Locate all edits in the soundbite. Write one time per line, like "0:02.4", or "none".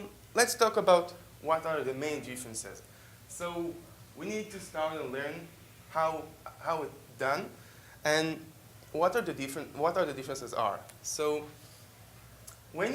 0:11.7

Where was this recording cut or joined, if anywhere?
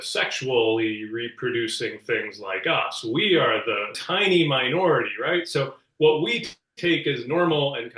0:04.0

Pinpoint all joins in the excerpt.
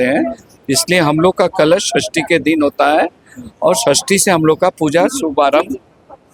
none

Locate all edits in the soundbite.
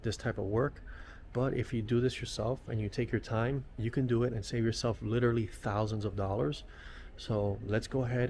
none

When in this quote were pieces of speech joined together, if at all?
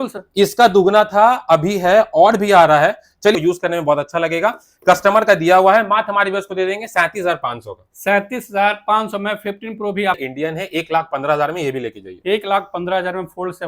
0:03.4
0:10.2

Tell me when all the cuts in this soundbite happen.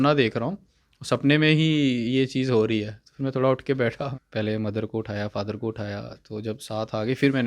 0:04.1

